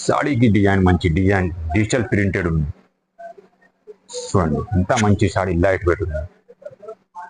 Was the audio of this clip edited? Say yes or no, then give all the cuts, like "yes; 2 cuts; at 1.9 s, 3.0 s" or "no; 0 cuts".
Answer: no; 0 cuts